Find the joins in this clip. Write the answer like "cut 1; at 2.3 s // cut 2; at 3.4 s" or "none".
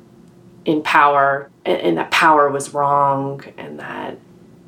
cut 1; at 1.5 s